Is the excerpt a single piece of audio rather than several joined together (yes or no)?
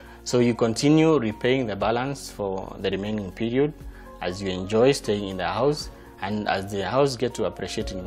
yes